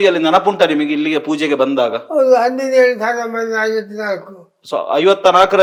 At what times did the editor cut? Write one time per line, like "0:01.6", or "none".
none